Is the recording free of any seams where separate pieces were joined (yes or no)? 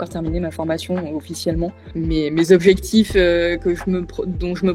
yes